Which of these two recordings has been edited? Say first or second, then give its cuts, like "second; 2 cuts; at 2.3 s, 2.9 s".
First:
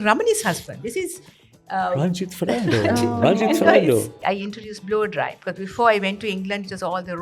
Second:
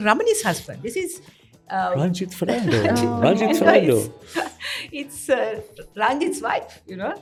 first; 1 cut; at 4.2 s